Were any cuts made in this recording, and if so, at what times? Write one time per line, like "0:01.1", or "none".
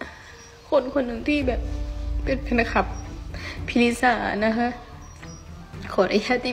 none